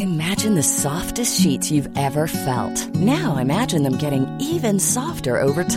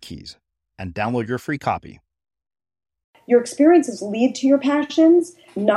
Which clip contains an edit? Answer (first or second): second